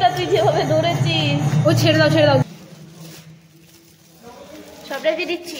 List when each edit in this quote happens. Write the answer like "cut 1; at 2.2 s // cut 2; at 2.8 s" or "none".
cut 1; at 2.5 s